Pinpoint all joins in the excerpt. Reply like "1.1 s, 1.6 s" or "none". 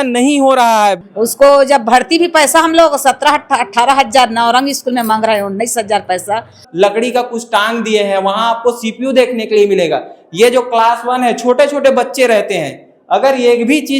1.0 s, 6.6 s